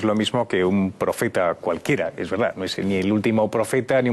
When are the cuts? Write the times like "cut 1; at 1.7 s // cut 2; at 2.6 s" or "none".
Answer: cut 1; at 2.1 s